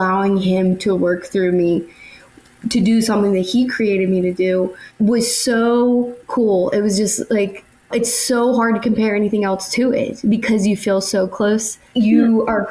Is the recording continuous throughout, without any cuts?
no; 2 cuts; at 4.8 s, 6.2 s

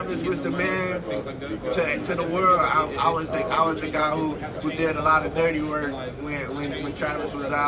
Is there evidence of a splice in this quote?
no; 0 cuts

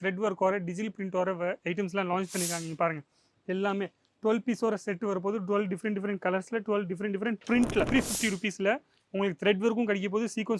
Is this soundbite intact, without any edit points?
no; 1 cut; at 7.9 s

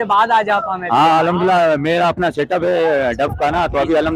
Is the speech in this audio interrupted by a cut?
no; 0 cuts

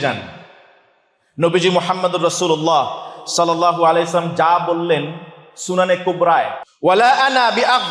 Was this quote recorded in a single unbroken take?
no; 1 cut; at 6.6 s

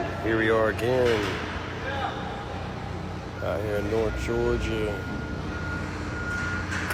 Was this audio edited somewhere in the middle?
no; 0 cuts

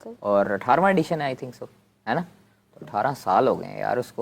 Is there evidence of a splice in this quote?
no; 0 cuts

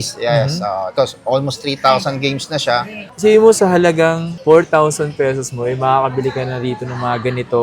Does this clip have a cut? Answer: yes; 1 cut; at 3.1 s

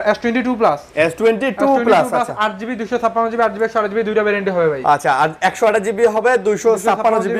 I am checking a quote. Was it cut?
no; 0 cuts

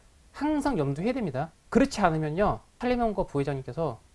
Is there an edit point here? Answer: yes; 2 cuts; at 1.6 s, 2.7 s

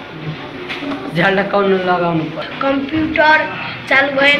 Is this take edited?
yes; 1 cut; at 2.4 s

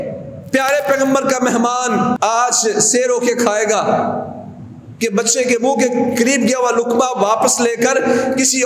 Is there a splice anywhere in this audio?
yes; 1 cut; at 2.2 s

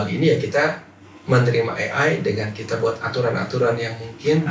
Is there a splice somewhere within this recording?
no; 0 cuts

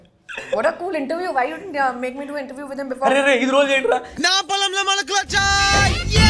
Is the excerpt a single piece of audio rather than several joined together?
yes; 0 cuts

